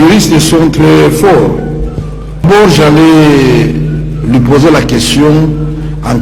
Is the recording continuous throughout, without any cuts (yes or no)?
no